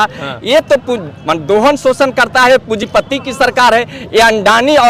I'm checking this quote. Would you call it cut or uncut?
uncut